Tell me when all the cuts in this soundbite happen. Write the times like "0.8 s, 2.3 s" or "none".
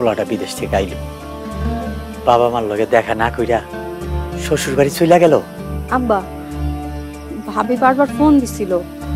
none